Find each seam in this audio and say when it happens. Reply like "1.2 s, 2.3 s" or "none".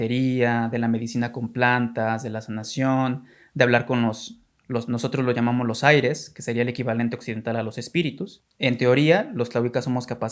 8.4 s